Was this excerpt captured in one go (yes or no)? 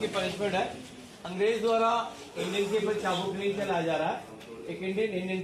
yes